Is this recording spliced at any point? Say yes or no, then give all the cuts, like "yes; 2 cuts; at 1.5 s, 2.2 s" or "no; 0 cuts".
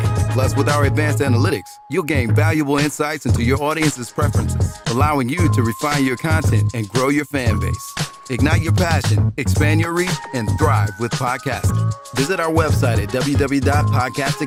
no; 0 cuts